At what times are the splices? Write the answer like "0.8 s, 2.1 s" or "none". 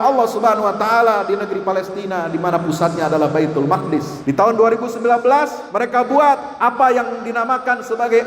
4.1 s, 5.6 s, 6.5 s